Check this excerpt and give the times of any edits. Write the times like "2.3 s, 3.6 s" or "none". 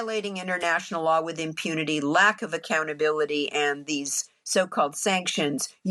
none